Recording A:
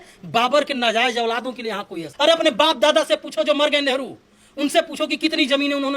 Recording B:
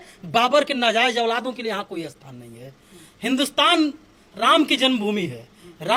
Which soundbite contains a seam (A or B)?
A